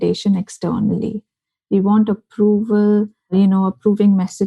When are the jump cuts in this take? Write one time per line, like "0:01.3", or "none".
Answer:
0:03.3